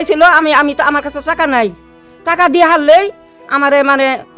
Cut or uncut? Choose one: uncut